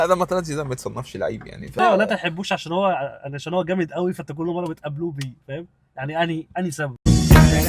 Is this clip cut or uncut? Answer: cut